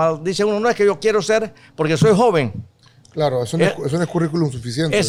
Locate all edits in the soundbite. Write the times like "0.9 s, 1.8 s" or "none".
none